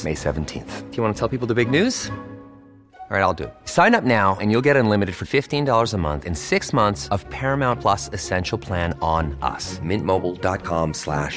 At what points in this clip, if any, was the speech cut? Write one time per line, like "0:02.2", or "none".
none